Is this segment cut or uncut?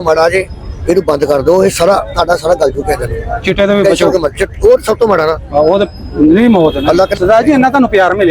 cut